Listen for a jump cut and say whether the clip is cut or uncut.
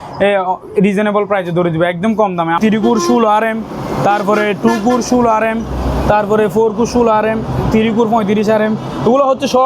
cut